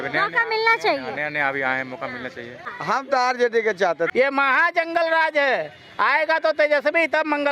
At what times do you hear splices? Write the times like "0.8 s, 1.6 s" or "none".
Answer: 2.7 s, 4.1 s